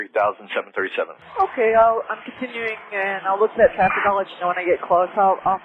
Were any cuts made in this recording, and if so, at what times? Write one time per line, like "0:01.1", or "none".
0:01.2